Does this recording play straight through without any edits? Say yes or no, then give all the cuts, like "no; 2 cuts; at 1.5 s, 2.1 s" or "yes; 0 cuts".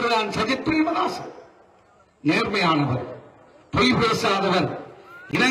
yes; 0 cuts